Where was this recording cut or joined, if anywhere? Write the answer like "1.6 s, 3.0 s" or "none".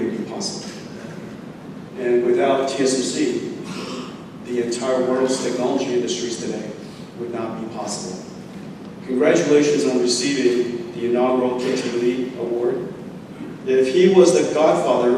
none